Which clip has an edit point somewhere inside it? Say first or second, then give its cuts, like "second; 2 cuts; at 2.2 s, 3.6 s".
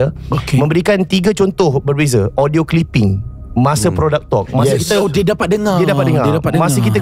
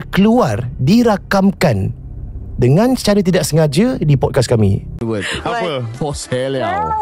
second; 1 cut; at 4.9 s